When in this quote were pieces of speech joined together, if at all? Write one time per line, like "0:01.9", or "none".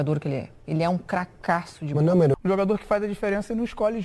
0:02.3